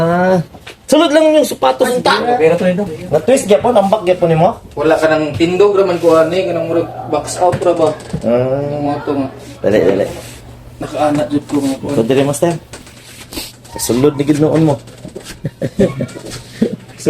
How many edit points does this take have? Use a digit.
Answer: 1